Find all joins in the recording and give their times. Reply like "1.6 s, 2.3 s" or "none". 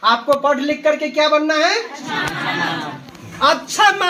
none